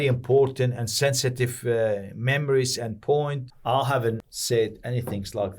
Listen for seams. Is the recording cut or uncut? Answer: cut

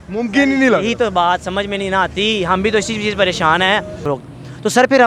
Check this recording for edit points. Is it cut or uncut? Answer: cut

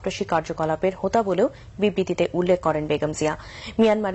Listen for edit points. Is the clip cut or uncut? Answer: uncut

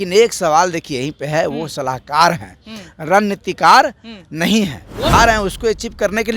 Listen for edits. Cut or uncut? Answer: cut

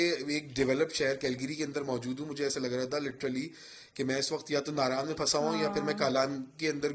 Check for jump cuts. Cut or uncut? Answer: uncut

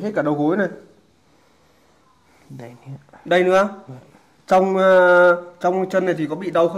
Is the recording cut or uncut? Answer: uncut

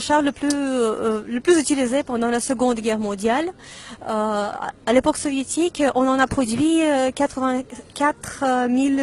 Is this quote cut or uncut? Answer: uncut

